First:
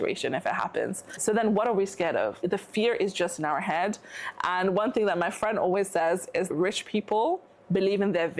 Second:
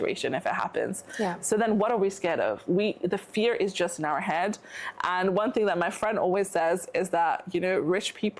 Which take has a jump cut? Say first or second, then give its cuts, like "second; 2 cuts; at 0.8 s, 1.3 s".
first; 3 cuts; at 1.1 s, 2.4 s, 6.5 s